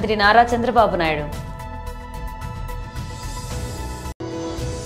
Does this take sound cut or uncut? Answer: cut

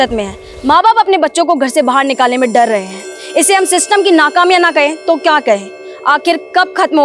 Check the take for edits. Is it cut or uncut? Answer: uncut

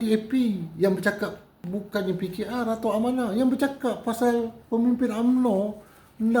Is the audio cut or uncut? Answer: cut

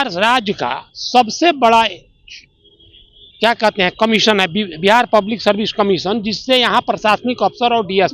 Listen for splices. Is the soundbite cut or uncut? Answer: uncut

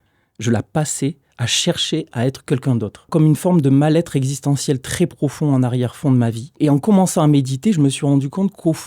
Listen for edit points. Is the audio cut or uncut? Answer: cut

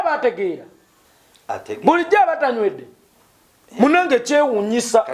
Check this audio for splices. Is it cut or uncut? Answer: uncut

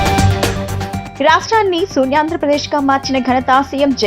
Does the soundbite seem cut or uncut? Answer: cut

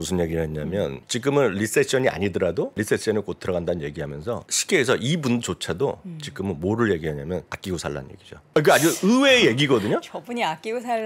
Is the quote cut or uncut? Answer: cut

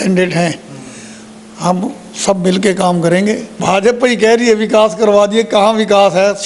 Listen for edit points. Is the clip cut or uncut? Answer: cut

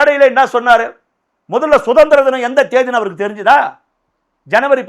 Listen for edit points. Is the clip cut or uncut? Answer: uncut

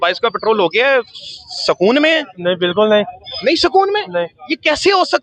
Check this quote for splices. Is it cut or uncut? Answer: uncut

